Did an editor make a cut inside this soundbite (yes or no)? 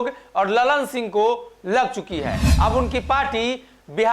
yes